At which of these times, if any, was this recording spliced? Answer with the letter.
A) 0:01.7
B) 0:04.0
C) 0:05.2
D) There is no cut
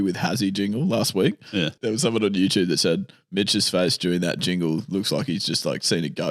A